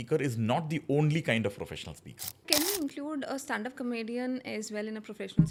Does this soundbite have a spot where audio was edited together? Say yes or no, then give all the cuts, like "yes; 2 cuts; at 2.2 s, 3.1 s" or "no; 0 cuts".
no; 0 cuts